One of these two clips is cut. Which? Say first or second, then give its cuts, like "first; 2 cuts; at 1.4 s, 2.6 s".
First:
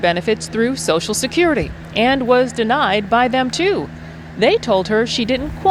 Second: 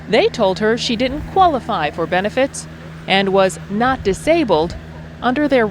second; 1 cut; at 4.2 s